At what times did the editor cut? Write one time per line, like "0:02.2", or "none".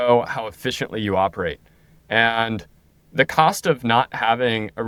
none